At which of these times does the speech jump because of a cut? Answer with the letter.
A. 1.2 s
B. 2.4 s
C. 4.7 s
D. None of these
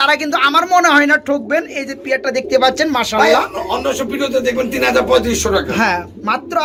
D